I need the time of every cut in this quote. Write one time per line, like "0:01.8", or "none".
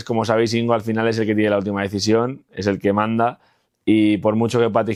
none